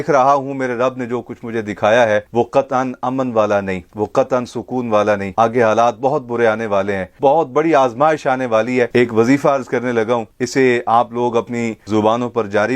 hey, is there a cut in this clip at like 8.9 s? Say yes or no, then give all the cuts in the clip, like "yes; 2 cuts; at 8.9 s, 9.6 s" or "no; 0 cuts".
yes; 3 cuts; at 7.0 s, 8.9 s, 11.8 s